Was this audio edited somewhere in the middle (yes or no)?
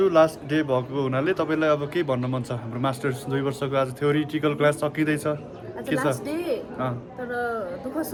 no